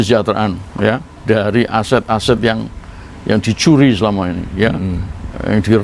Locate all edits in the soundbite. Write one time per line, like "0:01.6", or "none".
none